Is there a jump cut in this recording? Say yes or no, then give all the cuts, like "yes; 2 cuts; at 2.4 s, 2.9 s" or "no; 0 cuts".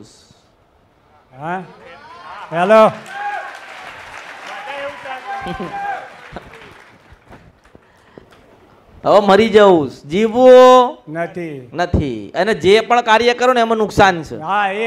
no; 0 cuts